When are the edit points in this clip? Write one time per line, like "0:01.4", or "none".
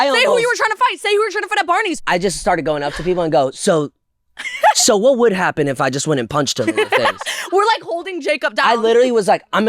0:01.9